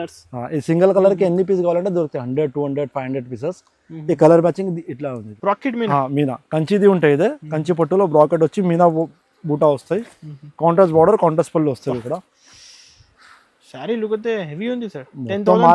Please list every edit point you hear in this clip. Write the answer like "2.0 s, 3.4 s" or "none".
5.3 s